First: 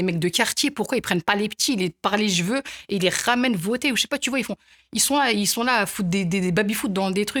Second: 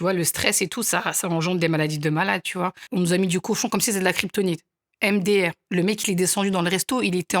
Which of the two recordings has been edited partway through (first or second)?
second